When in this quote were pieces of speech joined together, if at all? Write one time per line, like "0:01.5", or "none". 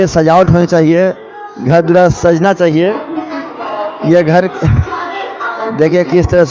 none